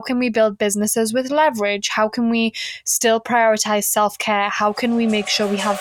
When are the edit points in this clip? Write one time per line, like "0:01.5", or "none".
none